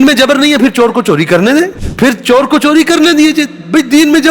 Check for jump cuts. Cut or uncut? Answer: cut